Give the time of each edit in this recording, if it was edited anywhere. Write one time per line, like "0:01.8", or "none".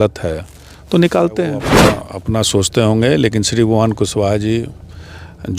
0:01.7